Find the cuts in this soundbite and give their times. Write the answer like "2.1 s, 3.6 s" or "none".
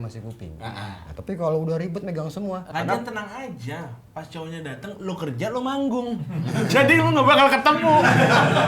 2.7 s

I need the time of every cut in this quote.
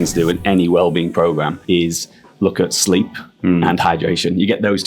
1.6 s

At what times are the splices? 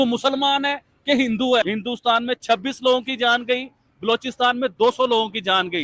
1.7 s

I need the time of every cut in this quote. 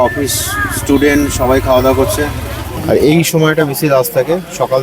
2.7 s

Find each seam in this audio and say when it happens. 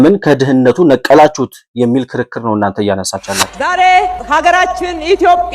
3.5 s

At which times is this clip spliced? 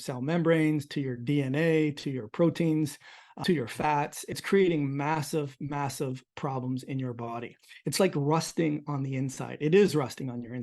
3.3 s, 4.4 s

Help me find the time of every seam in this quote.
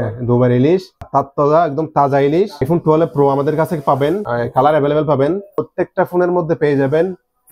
1.1 s, 2.7 s, 4.3 s, 5.6 s

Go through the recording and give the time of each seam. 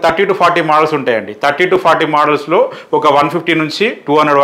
none

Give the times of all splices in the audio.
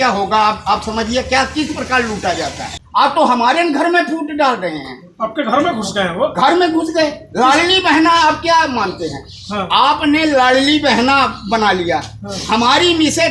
2.7 s

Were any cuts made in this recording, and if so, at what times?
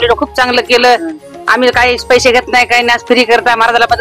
none

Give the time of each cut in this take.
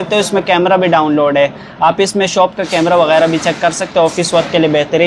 none

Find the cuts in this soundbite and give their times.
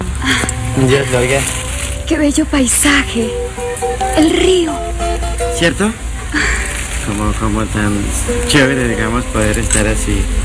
none

